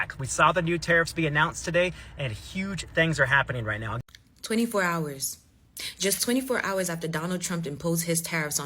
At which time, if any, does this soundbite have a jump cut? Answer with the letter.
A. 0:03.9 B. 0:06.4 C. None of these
A